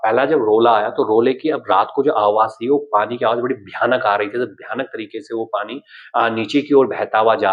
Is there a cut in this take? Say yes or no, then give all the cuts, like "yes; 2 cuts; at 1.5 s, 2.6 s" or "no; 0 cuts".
no; 0 cuts